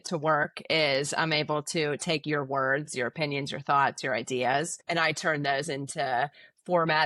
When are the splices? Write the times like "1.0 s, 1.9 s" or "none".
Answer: 4.8 s

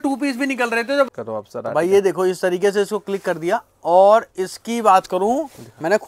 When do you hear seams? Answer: 1.1 s

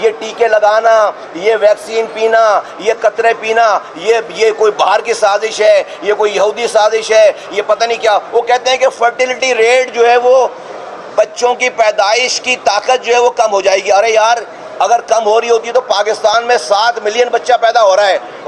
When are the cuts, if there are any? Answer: none

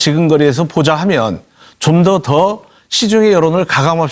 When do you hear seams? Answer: 2.3 s

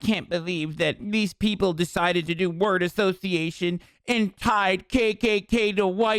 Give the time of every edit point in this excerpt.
1.0 s

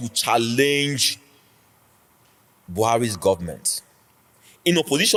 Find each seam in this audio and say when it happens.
none

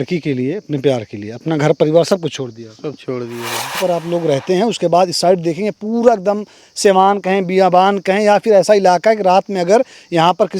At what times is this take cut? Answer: 3.8 s

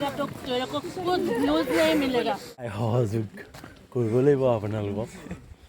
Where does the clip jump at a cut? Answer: 2.7 s

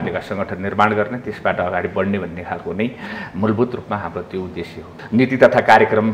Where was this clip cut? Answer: 5.0 s

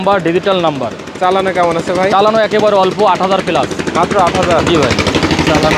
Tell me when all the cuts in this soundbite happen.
none

